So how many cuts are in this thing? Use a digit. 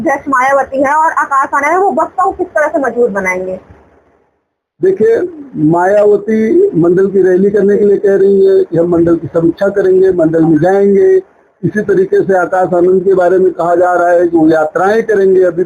0